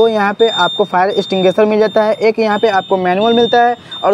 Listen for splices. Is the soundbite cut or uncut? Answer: uncut